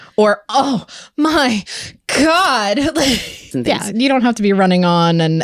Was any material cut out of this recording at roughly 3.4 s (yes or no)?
yes